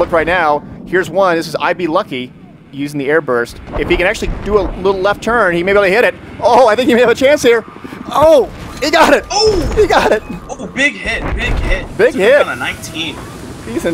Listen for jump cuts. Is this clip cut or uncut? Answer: cut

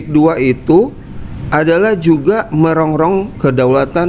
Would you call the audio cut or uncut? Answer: uncut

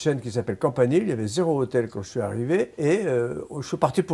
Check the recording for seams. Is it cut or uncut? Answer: cut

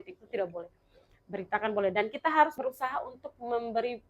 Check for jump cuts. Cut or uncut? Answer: cut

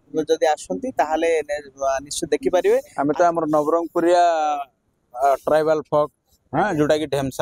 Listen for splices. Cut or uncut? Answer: cut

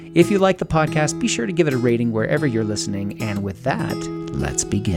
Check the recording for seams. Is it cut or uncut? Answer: uncut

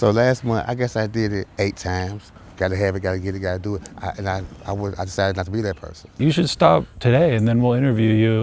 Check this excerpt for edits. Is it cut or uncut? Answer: cut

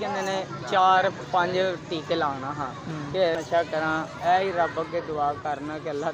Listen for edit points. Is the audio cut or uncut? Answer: cut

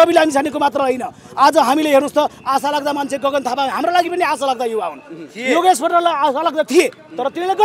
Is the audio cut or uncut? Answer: uncut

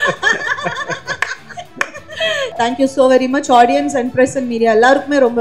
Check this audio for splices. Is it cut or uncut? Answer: cut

